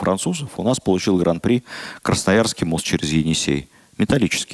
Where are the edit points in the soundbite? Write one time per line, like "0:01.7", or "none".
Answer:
none